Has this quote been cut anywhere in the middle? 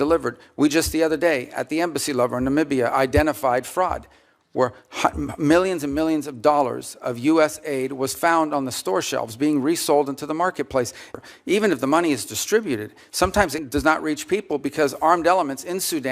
yes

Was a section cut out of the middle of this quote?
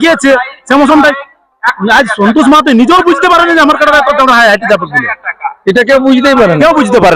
no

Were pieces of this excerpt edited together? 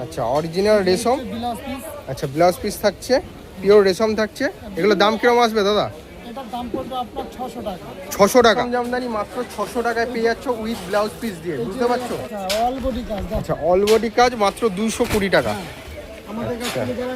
yes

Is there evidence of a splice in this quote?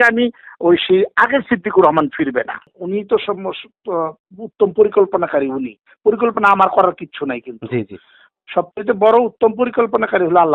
yes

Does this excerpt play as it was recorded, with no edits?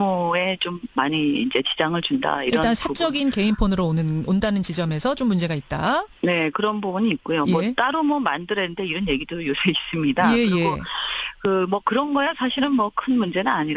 yes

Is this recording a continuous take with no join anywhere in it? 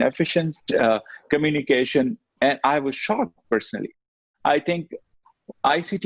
no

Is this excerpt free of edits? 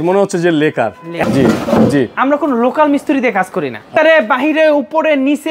no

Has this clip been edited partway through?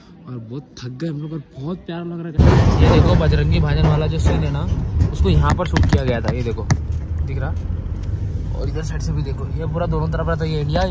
yes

